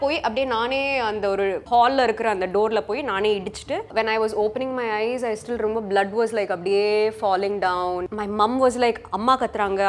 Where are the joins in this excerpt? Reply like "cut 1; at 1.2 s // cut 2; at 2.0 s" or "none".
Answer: cut 1; at 1.6 s // cut 2; at 3.9 s // cut 3; at 8.1 s